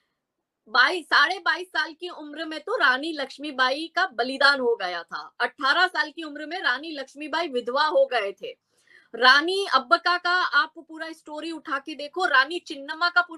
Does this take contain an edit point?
no; 0 cuts

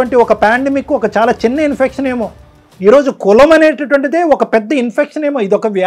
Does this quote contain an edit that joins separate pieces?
no; 0 cuts

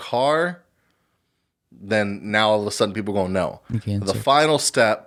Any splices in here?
no; 0 cuts

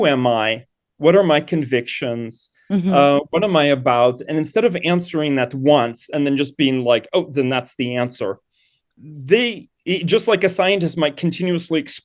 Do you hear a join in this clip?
no; 0 cuts

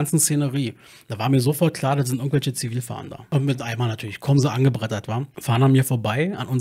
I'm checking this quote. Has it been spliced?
yes; 2 cuts; at 3.3 s, 5.3 s

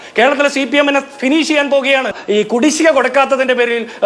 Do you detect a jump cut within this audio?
yes; 1 cut; at 2.2 s

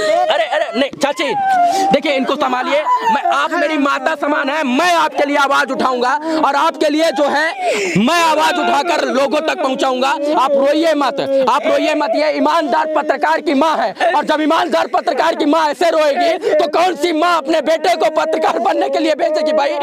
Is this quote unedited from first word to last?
yes; 0 cuts

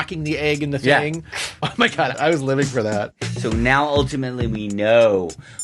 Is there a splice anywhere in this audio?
yes; 2 cuts; at 2.1 s, 3.2 s

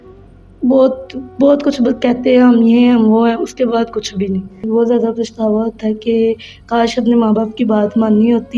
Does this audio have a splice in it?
yes; 1 cut; at 4.6 s

